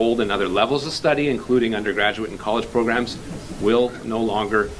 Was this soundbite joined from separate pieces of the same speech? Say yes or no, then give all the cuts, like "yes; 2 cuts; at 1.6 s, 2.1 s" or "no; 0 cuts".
no; 0 cuts